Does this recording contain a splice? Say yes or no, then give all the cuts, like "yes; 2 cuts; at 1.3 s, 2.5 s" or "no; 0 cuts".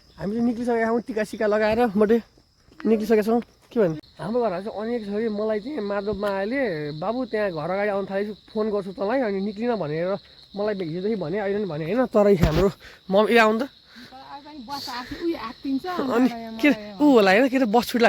yes; 1 cut; at 4.1 s